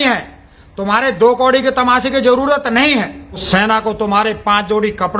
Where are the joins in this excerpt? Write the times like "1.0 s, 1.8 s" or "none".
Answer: 3.4 s